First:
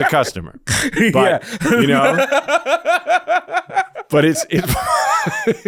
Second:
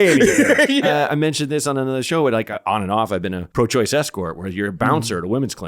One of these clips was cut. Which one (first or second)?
second